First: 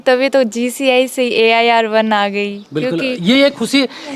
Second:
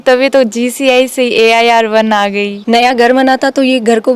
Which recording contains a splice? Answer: second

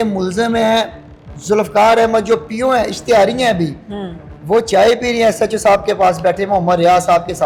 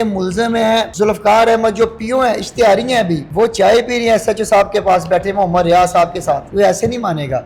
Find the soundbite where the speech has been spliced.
second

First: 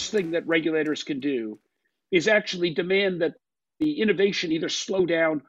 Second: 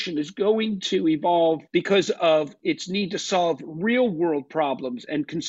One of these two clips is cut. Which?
second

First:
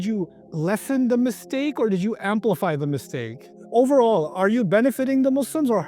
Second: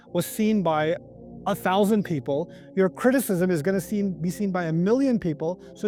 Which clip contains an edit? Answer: first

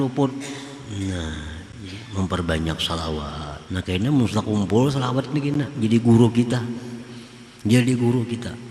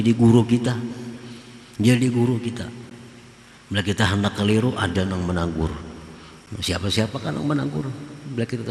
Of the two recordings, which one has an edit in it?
first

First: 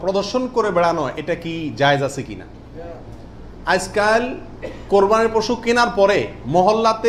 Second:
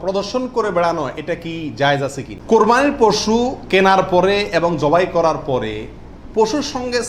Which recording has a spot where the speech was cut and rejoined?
second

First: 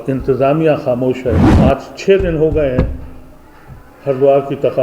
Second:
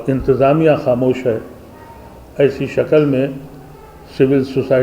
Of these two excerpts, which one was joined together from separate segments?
first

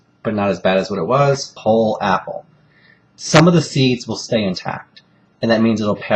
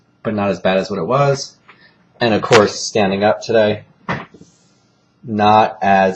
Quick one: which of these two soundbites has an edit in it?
second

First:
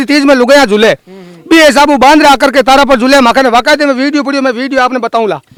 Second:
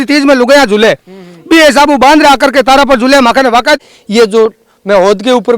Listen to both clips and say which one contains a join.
second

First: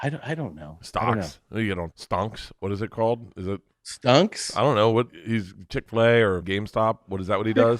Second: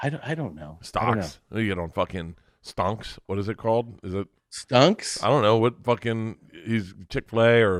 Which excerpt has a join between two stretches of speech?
first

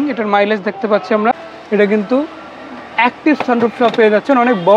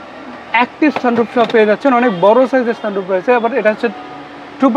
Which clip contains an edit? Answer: first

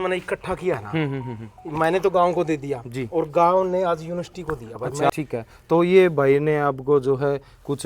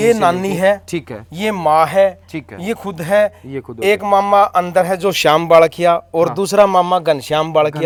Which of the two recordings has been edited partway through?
first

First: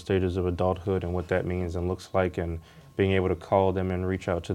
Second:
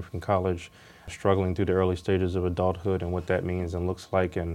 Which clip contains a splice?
second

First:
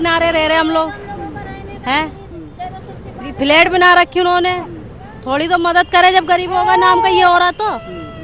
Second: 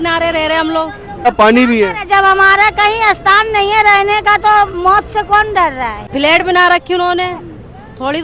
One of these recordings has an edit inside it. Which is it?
second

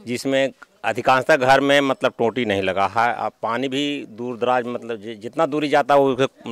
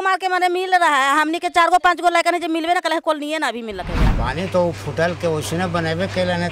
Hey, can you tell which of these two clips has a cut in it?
second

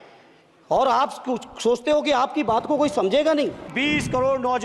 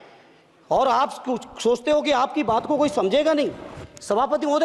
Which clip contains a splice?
first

